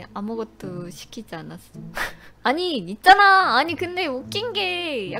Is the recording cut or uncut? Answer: uncut